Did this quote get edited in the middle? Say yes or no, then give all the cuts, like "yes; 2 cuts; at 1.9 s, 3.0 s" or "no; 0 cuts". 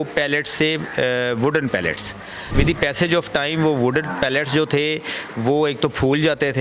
yes; 1 cut; at 2.5 s